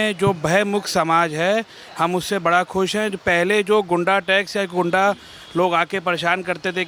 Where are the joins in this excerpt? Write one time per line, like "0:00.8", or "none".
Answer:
none